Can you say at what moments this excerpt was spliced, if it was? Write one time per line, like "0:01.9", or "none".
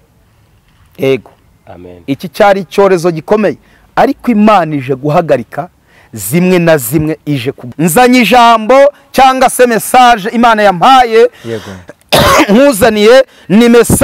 0:07.5